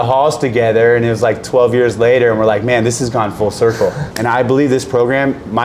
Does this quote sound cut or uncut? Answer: cut